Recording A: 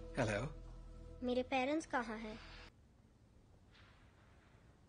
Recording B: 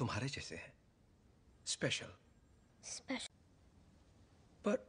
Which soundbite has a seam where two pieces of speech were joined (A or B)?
A